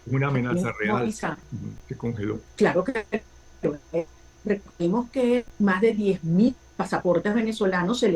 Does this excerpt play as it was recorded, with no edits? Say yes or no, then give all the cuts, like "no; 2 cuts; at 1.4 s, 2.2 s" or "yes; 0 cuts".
yes; 0 cuts